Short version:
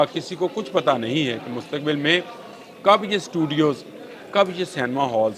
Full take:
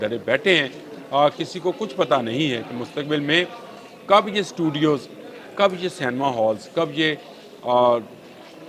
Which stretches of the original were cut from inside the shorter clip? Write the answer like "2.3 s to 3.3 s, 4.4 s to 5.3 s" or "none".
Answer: none